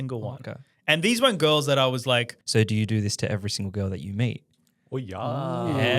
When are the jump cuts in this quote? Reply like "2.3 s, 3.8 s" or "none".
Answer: 2.4 s